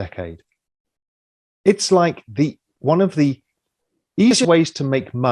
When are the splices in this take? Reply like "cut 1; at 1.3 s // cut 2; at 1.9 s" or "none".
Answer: cut 1; at 4.4 s